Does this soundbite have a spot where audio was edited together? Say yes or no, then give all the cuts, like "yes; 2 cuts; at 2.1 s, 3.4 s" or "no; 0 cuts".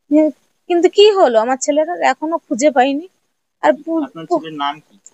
no; 0 cuts